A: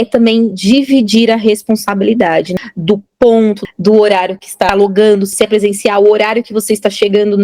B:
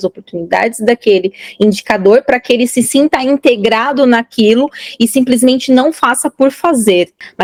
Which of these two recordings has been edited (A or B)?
A